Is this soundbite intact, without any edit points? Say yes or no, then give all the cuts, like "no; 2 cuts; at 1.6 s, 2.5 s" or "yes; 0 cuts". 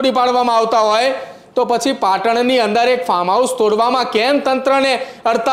yes; 0 cuts